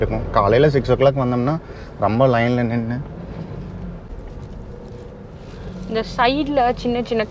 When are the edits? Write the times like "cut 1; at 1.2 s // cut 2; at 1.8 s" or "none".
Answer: cut 1; at 4.1 s